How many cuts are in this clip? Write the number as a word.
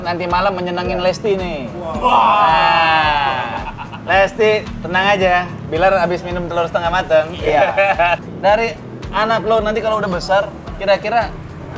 one